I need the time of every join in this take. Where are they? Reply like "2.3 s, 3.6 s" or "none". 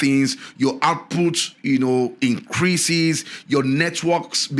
none